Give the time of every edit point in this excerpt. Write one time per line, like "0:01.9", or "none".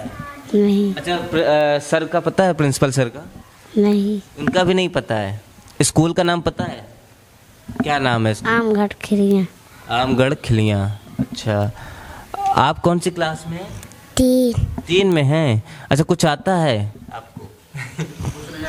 none